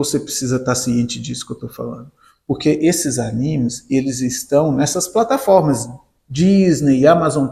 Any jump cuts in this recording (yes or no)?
no